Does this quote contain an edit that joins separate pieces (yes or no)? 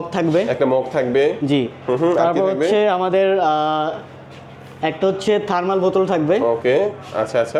no